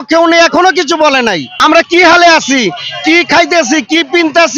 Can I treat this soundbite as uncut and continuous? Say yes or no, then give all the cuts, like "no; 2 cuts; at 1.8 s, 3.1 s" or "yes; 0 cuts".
no; 1 cut; at 1.5 s